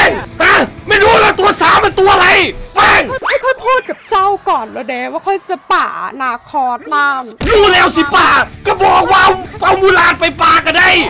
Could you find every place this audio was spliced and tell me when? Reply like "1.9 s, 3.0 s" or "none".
none